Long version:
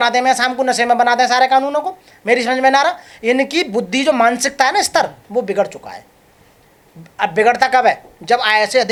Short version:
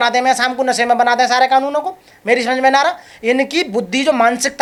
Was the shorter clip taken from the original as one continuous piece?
yes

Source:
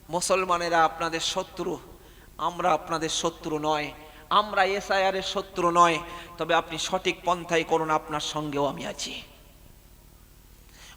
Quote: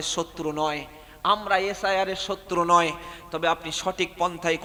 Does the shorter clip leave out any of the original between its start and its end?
no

